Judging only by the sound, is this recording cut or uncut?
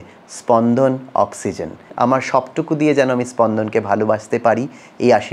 cut